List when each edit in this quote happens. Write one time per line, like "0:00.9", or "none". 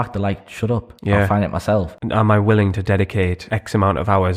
0:00.9
0:01.9
0:03.4